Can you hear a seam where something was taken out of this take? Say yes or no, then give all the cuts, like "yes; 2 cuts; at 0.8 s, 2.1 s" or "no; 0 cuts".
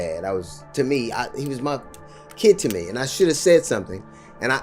no; 0 cuts